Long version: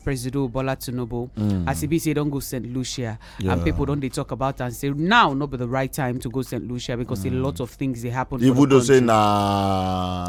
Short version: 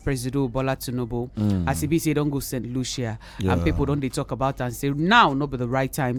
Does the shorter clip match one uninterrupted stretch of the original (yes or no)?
yes